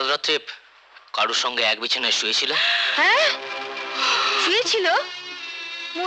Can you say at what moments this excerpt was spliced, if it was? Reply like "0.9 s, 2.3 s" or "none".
none